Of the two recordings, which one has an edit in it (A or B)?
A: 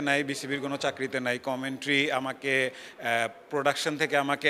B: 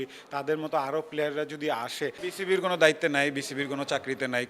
B